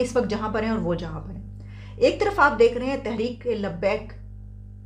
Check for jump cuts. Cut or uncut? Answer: uncut